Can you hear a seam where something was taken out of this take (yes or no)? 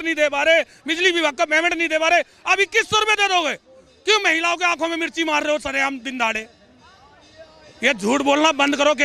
no